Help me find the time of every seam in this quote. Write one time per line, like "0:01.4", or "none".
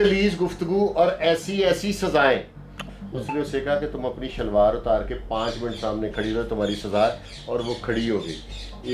0:02.7